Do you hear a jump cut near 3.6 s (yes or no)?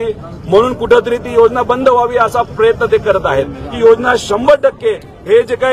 yes